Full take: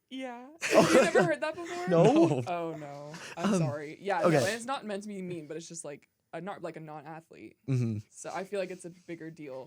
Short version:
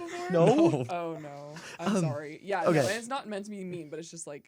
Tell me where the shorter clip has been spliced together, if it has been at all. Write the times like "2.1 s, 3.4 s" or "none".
none